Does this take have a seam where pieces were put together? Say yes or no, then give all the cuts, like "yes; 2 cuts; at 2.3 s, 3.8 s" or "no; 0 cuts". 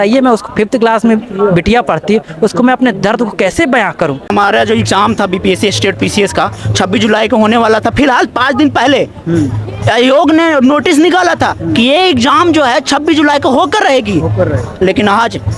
yes; 1 cut; at 4.3 s